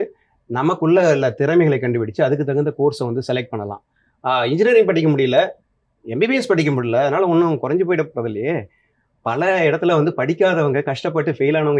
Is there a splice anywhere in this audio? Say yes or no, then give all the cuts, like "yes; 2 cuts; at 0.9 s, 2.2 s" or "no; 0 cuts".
no; 0 cuts